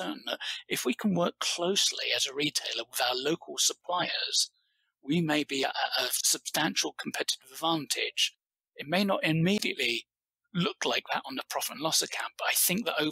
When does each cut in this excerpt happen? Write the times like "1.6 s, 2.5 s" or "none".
5.9 s